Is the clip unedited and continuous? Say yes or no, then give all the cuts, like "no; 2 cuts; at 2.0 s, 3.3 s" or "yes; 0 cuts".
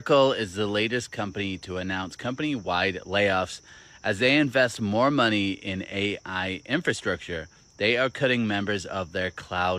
yes; 0 cuts